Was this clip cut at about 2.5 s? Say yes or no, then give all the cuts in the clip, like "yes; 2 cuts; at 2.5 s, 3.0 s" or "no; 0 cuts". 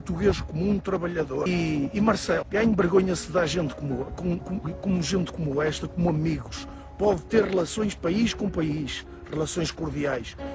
yes; 2 cuts; at 1.5 s, 2.5 s